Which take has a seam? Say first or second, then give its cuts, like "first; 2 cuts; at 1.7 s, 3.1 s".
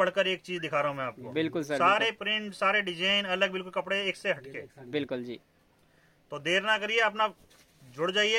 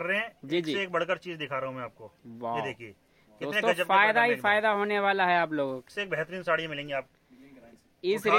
second; 2 cuts; at 5.9 s, 7.1 s